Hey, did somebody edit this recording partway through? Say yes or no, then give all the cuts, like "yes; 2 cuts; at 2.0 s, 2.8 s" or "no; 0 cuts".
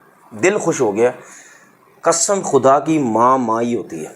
no; 0 cuts